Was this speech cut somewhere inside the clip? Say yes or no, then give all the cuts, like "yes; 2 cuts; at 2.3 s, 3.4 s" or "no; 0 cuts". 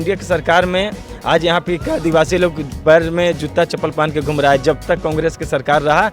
no; 0 cuts